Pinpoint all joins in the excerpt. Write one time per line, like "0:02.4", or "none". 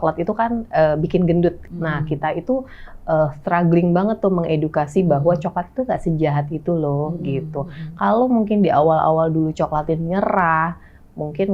0:01.7